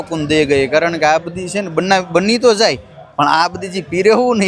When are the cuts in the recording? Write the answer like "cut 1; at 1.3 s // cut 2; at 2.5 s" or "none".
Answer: none